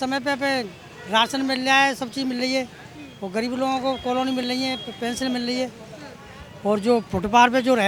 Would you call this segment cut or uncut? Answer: uncut